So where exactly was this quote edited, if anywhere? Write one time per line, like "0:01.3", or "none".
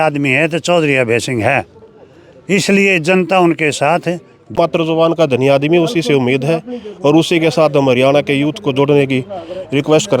0:04.5